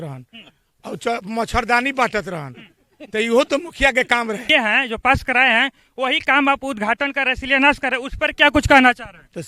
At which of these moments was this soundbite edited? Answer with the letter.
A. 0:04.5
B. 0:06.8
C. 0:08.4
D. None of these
A